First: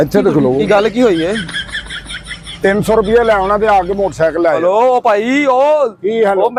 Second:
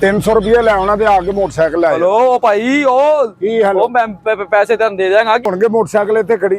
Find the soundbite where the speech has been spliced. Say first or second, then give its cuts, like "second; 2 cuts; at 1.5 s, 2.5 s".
second; 1 cut; at 5.5 s